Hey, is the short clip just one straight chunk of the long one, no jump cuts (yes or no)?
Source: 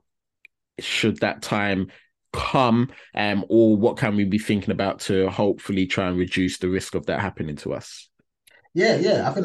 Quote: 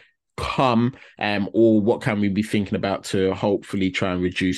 yes